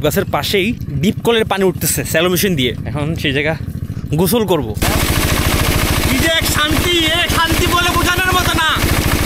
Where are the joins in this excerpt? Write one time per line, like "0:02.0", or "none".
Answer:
0:00.9
0:02.8
0:04.8